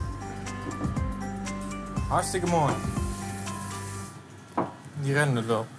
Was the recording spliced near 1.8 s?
no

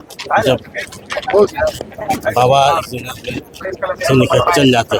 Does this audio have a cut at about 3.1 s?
no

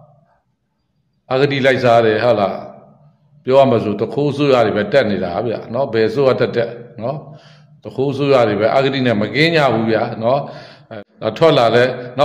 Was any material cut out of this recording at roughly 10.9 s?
yes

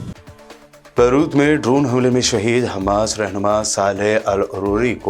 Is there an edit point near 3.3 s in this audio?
no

